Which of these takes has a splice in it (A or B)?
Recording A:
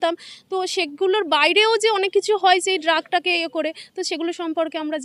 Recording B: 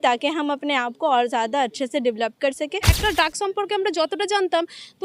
B